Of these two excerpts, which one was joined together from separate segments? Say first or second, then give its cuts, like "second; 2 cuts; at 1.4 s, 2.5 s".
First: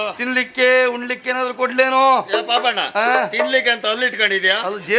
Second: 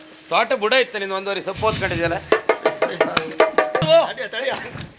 second; 1 cut; at 3.8 s